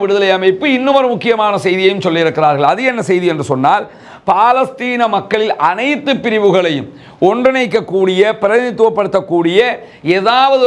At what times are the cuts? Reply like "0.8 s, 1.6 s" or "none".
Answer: none